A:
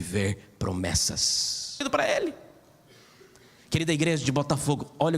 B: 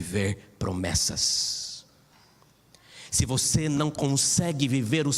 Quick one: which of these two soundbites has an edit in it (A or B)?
A